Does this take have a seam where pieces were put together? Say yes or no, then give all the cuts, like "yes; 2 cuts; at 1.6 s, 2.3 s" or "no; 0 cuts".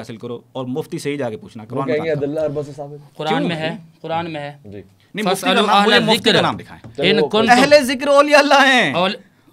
no; 0 cuts